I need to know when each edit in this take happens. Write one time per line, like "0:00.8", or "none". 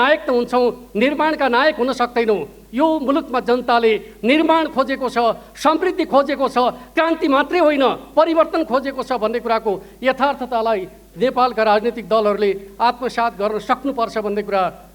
none